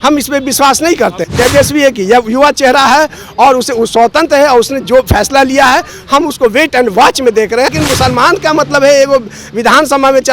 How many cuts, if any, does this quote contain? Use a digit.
2